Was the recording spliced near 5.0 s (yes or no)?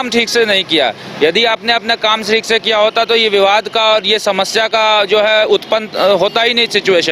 no